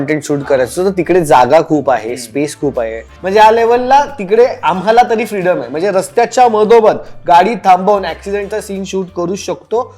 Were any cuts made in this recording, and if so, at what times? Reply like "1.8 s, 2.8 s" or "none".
3.1 s